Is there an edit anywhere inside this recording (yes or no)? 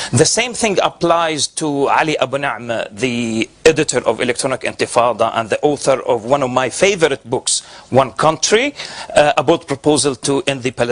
yes